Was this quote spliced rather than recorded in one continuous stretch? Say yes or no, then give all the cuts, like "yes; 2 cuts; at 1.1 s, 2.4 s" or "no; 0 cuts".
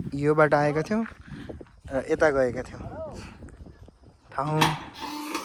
no; 0 cuts